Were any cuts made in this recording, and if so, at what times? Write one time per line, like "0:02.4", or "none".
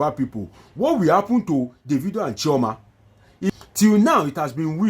0:03.5